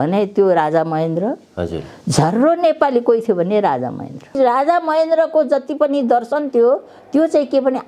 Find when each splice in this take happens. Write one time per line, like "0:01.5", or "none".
0:04.3